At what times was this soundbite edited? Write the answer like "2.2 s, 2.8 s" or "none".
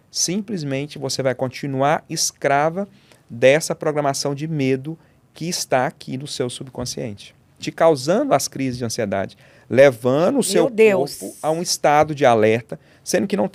none